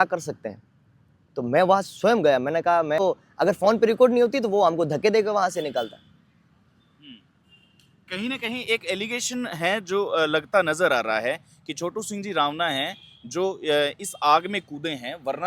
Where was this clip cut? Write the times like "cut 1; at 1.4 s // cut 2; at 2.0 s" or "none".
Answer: cut 1; at 3.0 s